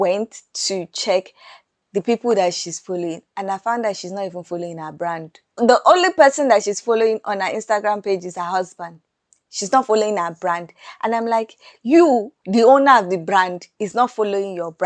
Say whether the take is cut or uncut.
cut